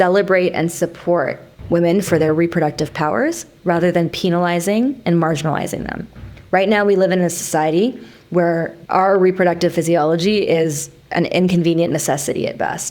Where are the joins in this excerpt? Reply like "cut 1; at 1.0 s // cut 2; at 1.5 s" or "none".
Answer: cut 1; at 1.5 s // cut 2; at 8.8 s

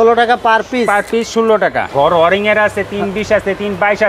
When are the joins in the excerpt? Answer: cut 1; at 1.9 s

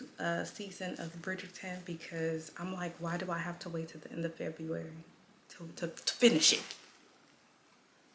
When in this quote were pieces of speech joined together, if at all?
none

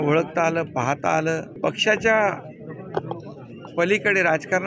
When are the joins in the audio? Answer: cut 1; at 1.5 s

